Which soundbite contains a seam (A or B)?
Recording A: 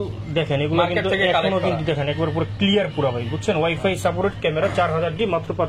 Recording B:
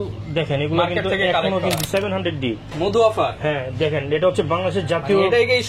B